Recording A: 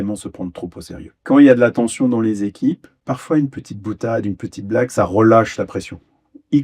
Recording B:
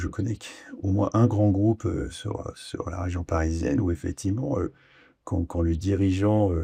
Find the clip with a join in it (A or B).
A